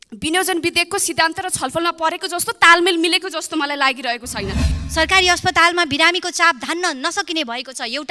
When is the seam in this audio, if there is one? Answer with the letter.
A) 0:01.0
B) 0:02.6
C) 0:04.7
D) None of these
C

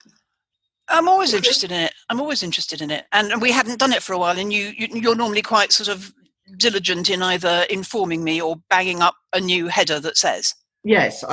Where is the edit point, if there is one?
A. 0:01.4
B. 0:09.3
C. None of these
C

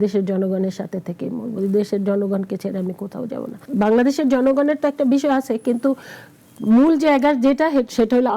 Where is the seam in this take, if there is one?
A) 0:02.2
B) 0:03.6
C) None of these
B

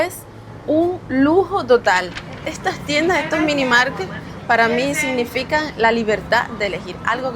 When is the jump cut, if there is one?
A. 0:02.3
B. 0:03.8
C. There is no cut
A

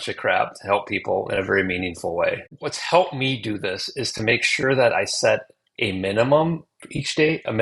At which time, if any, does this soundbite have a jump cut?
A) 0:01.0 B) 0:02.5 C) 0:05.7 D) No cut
B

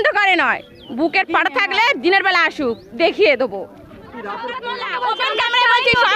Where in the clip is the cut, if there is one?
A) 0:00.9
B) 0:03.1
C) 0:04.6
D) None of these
C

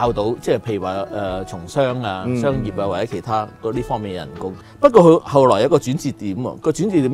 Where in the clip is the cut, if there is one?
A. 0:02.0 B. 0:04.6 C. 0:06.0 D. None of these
B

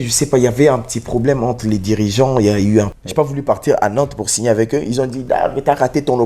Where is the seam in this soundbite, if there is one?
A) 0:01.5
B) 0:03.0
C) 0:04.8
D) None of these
B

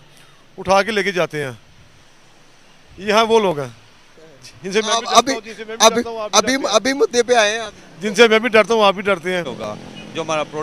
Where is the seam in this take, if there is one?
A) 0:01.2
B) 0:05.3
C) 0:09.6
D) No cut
C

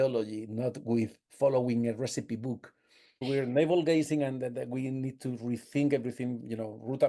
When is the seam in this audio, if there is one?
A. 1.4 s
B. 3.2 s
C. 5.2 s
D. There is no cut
B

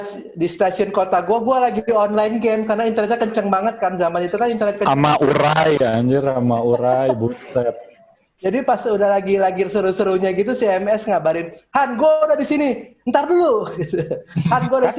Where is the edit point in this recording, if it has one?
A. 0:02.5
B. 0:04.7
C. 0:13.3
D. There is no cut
D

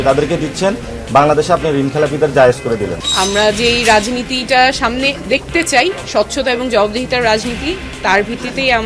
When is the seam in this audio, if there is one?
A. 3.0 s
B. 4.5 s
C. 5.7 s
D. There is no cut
A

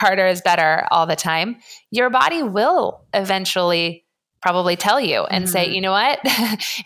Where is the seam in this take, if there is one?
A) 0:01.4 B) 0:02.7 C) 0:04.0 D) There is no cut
D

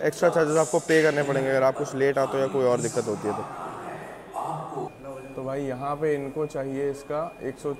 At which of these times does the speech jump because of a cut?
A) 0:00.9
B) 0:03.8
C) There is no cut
C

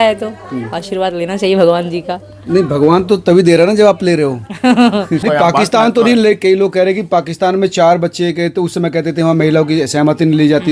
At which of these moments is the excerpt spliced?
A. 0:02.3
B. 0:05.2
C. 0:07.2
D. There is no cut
B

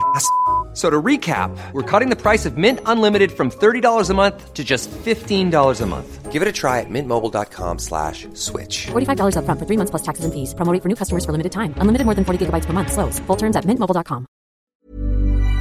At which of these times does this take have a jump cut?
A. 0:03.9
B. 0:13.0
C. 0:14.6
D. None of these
C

